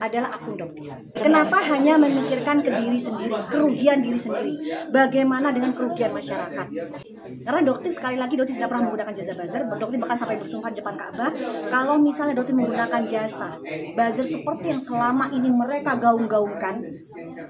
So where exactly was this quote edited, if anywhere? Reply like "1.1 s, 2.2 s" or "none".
1.2 s, 7.0 s